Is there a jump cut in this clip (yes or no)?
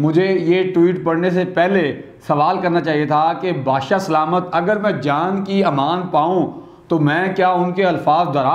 no